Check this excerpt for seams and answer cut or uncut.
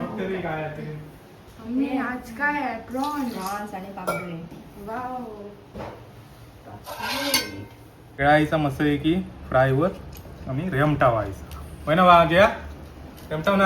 cut